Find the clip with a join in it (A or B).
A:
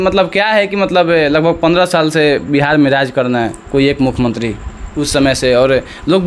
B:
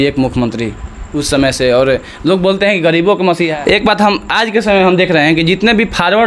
B